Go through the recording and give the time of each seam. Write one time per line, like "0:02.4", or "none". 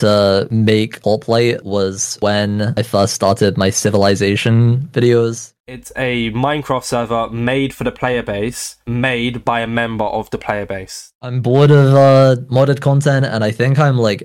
0:05.5
0:11.2

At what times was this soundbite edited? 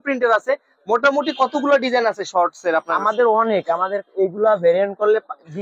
none

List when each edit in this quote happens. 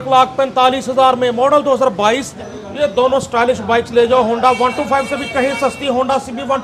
0:02.3

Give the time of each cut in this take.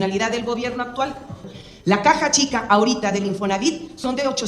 0:01.5

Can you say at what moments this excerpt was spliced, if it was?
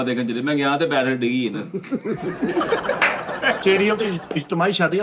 0:03.6

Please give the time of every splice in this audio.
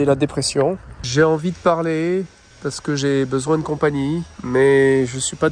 0:00.9
0:02.4
0:04.3

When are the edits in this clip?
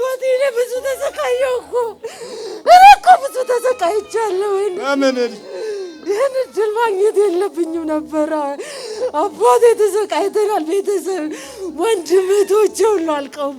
none

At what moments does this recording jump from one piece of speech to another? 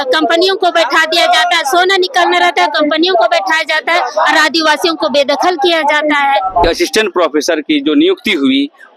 0:06.6

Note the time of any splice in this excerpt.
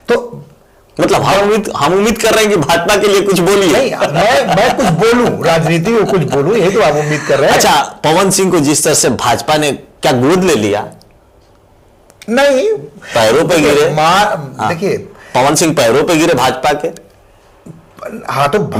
none

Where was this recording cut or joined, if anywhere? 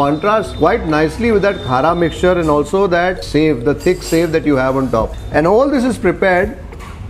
0:03.2
0:05.2

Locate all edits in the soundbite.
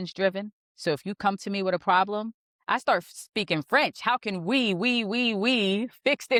none

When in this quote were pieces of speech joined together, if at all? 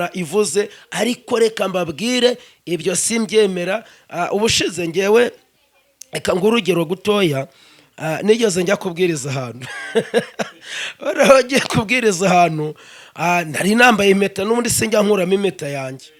none

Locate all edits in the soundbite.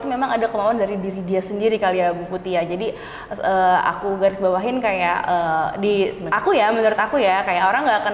none

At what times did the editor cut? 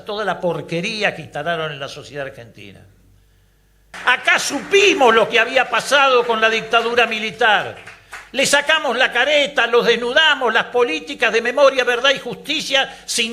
0:03.9

